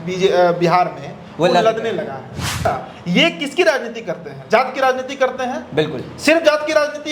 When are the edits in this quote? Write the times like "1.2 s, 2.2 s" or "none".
2.6 s